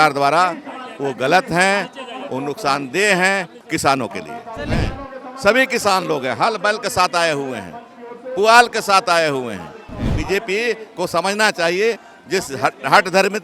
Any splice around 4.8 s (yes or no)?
yes